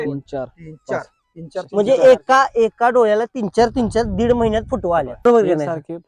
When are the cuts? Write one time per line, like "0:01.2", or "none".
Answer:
0:05.1